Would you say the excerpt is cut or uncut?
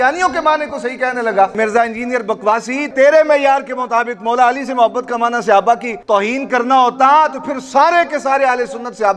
cut